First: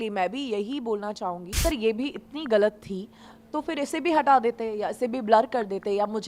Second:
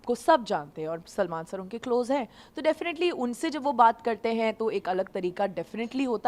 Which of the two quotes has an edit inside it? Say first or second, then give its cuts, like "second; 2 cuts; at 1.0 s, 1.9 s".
first; 1 cut; at 1.6 s